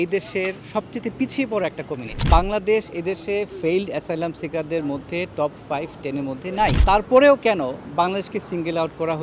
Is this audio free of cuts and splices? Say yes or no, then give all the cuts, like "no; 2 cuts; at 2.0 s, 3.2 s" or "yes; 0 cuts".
no; 2 cuts; at 2.1 s, 6.8 s